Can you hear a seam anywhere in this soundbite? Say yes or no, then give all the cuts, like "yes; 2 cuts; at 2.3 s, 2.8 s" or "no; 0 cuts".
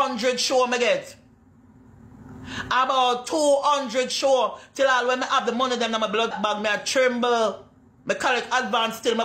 yes; 1 cut; at 6.3 s